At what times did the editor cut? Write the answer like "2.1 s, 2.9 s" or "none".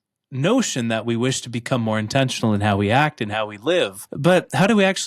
4.0 s